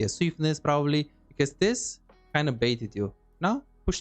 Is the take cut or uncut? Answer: cut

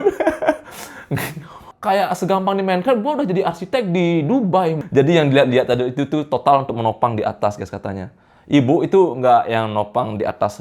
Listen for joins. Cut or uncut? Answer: cut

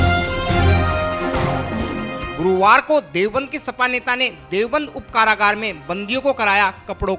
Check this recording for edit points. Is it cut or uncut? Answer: cut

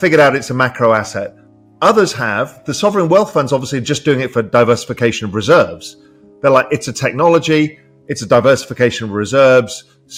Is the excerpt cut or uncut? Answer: uncut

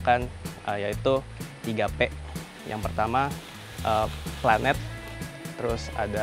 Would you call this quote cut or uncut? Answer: uncut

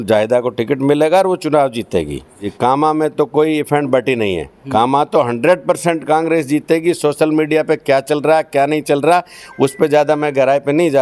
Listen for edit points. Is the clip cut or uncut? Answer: cut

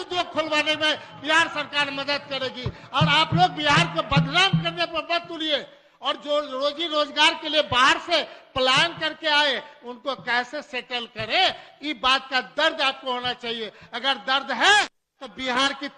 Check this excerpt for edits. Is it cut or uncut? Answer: uncut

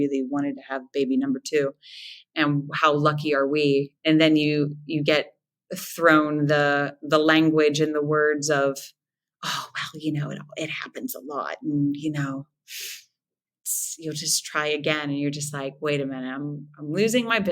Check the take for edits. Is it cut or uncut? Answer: cut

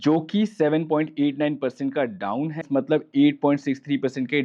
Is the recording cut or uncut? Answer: cut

